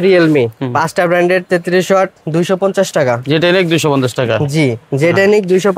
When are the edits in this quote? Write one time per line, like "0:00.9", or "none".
none

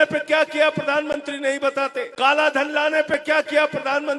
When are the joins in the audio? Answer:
0:02.1

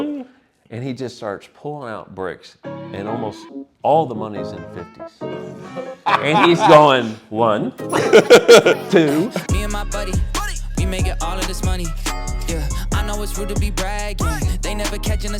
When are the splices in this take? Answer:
0:09.3

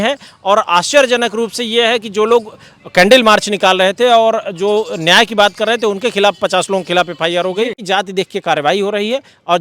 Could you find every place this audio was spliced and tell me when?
0:07.8

